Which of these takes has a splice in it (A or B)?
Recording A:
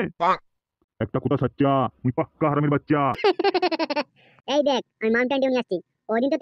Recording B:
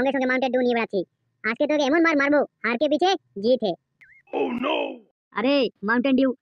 A